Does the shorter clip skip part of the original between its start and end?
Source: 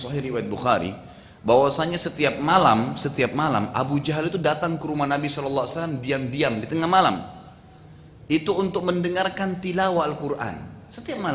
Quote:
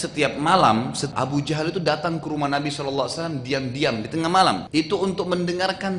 yes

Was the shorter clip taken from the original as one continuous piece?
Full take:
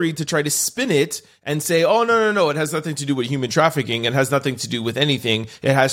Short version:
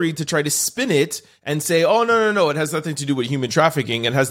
yes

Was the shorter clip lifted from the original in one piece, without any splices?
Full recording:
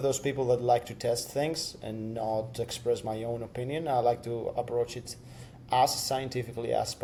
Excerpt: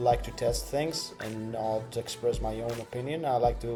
yes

